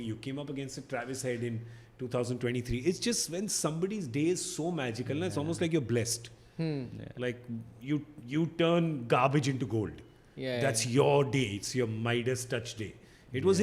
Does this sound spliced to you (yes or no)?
no